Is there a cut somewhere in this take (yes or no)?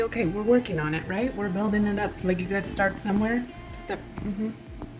no